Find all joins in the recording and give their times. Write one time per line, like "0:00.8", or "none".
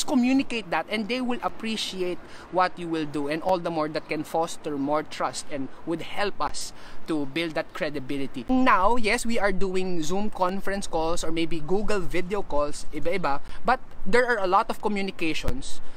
0:08.4